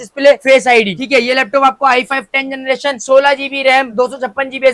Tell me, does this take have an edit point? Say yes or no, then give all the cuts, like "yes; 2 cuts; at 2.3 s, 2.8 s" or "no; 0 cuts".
no; 0 cuts